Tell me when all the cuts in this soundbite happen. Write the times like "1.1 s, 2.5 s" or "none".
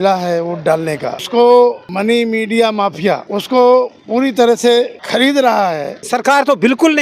1.2 s, 1.9 s, 3.2 s, 5.0 s, 6.0 s

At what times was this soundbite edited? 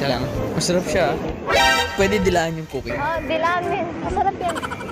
none

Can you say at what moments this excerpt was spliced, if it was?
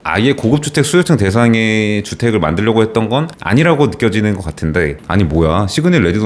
5.0 s

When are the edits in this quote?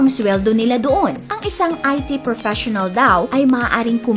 1.3 s

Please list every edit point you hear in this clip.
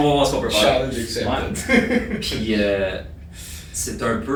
none

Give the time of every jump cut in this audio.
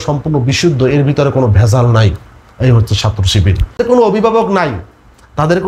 3.8 s

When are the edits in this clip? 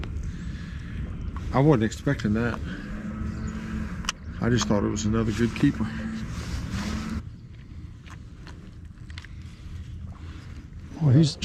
none

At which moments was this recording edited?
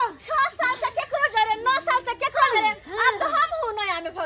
none

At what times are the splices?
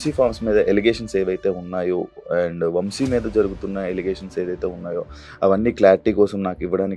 none

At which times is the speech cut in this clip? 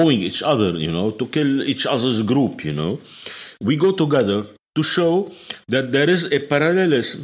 none

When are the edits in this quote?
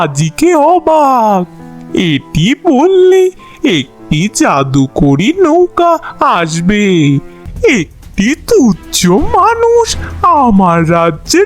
7.4 s

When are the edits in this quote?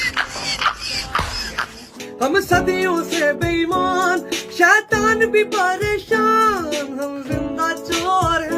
1.9 s

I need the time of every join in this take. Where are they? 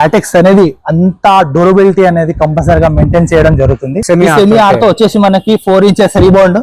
3.9 s

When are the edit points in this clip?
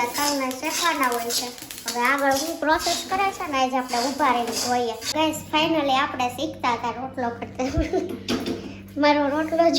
5.1 s

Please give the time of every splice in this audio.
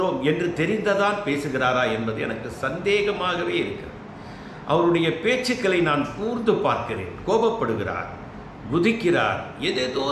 none

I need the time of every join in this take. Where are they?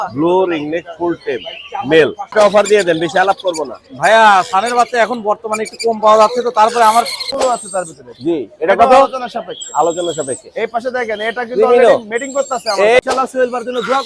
2.3 s, 7.3 s, 13.0 s

